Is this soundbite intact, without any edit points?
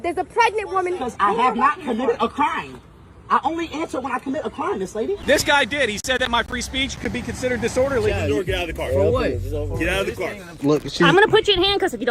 no; 4 cuts; at 1.1 s, 5.2 s, 8.1 s, 10.5 s

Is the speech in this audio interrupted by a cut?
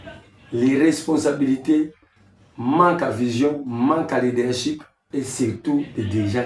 yes; 1 cut; at 4.9 s

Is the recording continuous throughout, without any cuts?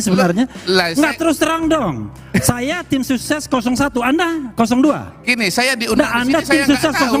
yes; 0 cuts

